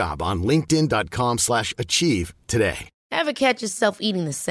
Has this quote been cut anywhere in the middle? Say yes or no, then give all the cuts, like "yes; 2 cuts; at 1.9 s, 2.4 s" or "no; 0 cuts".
yes; 1 cut; at 2.9 s